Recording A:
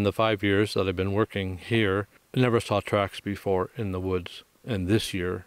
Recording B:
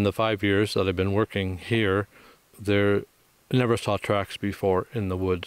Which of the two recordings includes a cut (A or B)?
A